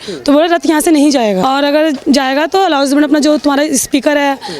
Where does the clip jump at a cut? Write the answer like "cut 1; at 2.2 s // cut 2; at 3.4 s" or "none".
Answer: cut 1; at 1.4 s

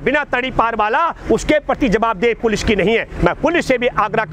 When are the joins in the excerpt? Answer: none

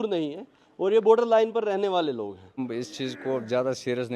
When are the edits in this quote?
cut 1; at 2.6 s

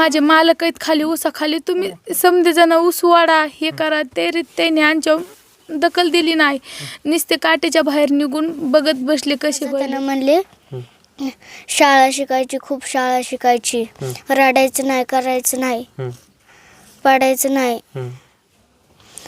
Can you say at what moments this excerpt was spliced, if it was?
cut 1; at 9.8 s

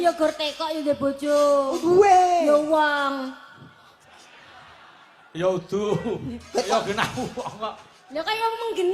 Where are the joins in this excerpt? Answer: none

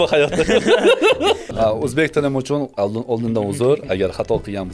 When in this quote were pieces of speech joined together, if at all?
cut 1; at 1.5 s

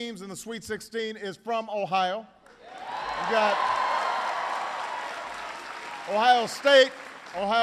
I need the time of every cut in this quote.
cut 1; at 4.7 s

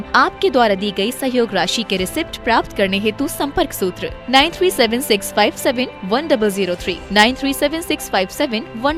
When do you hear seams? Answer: none

